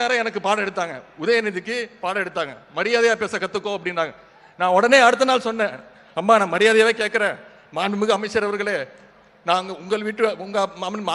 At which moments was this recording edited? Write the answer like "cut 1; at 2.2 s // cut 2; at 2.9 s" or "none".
none